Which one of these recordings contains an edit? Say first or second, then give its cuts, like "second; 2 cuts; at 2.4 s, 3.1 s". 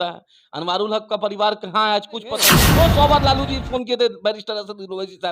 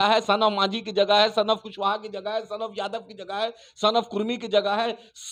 first; 1 cut; at 2.6 s